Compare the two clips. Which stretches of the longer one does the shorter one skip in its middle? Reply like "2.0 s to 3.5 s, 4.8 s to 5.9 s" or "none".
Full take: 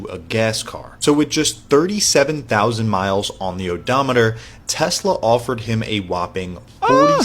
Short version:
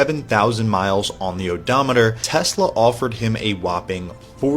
4.4 s to 4.7 s